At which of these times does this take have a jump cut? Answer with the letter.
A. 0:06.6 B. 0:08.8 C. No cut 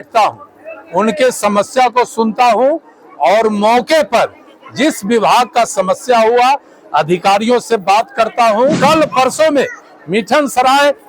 B